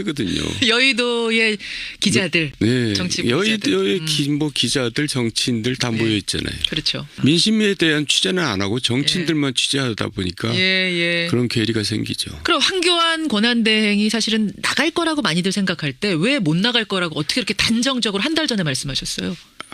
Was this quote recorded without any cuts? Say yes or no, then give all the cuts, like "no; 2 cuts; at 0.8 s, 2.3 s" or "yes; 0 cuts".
yes; 0 cuts